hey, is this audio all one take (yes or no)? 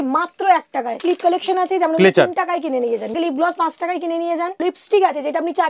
no